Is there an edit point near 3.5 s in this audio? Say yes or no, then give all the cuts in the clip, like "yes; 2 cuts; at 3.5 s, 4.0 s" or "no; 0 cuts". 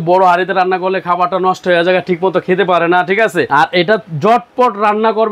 yes; 1 cut; at 3.5 s